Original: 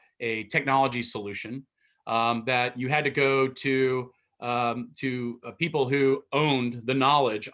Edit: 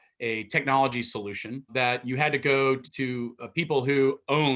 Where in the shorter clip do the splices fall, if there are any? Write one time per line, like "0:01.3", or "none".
0:01.7
0:02.9